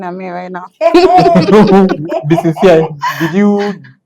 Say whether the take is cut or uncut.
uncut